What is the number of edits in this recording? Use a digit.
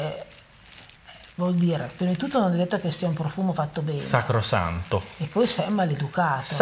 0